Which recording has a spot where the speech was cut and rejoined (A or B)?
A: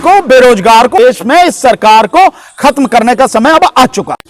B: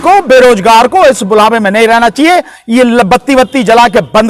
A